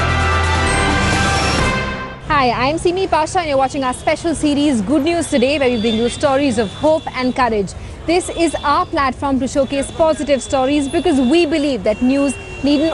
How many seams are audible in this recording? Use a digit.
1